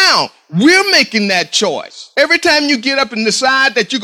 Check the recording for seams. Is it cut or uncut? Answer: cut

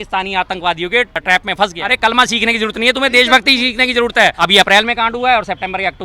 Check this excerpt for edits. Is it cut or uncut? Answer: cut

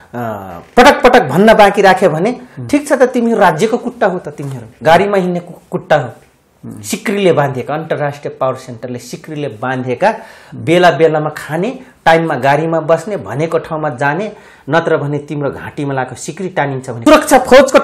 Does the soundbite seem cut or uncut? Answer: cut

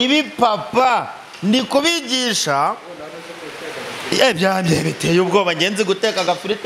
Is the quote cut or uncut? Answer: uncut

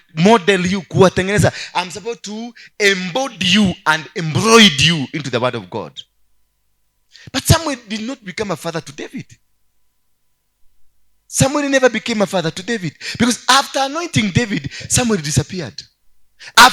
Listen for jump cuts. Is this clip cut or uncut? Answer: uncut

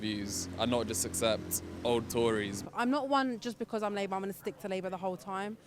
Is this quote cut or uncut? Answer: cut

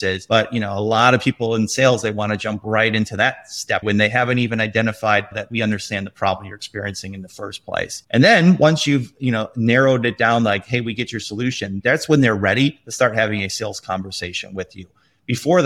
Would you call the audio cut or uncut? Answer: uncut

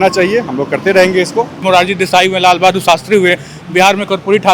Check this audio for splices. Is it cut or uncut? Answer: cut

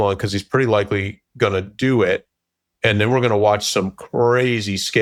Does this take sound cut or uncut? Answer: uncut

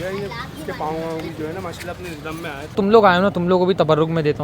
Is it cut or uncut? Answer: cut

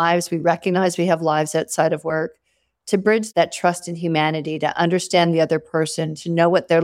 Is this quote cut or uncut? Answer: uncut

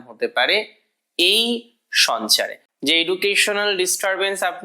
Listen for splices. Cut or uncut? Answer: cut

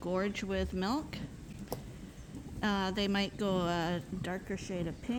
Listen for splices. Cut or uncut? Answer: uncut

